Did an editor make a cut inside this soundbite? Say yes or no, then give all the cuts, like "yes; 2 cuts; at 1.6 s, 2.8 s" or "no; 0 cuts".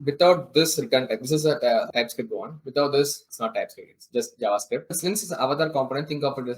yes; 1 cut; at 4.9 s